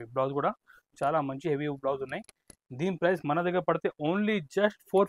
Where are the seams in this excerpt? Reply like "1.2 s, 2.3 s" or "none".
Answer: none